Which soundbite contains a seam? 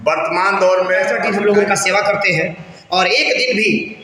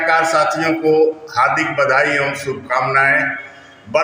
first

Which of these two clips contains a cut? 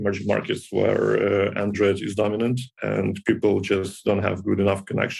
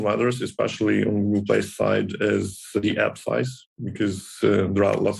second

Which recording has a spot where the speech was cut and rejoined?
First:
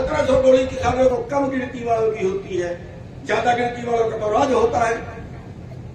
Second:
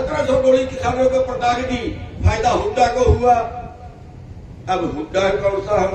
first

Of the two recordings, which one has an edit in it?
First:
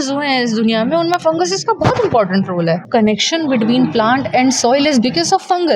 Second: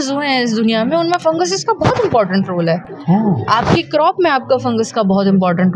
first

